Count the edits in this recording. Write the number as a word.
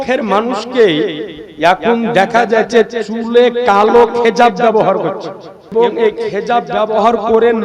one